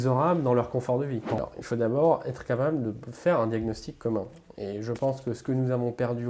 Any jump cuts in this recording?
yes; 1 cut; at 1.4 s

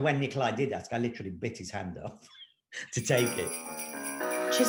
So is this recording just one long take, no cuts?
yes; 0 cuts

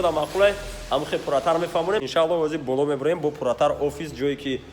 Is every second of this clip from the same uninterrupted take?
no; 1 cut; at 2.0 s

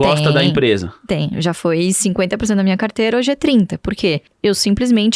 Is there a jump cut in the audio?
yes; 1 cut; at 4.3 s

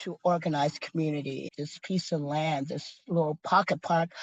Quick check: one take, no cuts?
no; 1 cut; at 1.5 s

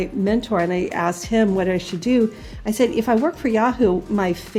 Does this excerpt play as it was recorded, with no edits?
yes; 0 cuts

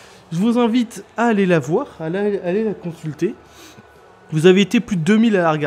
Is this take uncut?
no; 1 cut; at 2.8 s

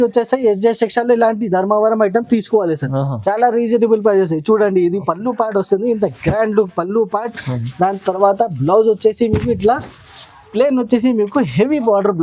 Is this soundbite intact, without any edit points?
yes; 0 cuts

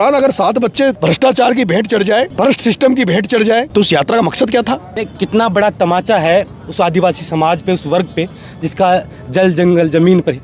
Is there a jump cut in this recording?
yes; 4 cuts; at 1.0 s, 2.3 s, 3.7 s, 5.0 s

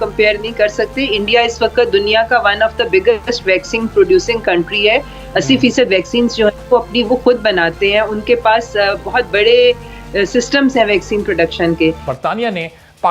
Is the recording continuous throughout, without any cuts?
no; 1 cut; at 12.1 s

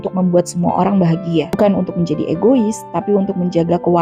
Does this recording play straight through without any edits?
no; 1 cut; at 1.6 s

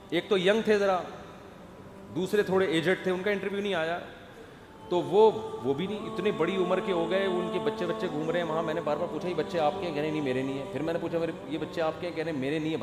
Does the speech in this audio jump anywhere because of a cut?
no; 0 cuts

